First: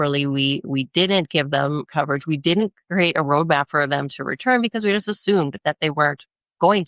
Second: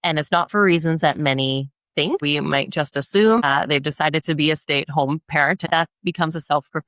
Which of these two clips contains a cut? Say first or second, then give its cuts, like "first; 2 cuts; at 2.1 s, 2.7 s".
second; 3 cuts; at 2.2 s, 3.4 s, 5.6 s